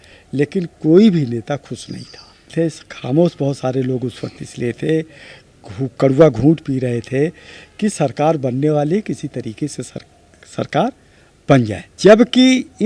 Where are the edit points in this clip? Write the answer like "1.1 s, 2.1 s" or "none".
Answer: 2.5 s, 11.8 s